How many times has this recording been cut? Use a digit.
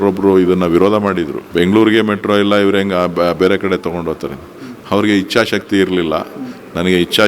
1